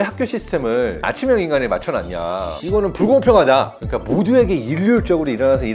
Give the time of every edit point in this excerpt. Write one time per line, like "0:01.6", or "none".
0:03.8